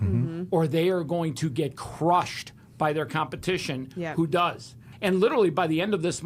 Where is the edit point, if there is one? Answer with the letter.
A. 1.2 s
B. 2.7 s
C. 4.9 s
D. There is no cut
C